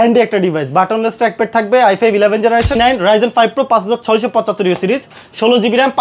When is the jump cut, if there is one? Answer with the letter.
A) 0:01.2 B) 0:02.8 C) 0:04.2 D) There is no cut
B